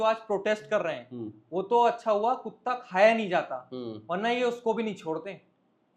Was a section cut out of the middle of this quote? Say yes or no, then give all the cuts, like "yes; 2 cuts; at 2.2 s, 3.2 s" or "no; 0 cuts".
no; 0 cuts